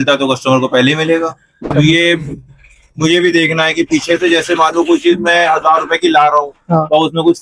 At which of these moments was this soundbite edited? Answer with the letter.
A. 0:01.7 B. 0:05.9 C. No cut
A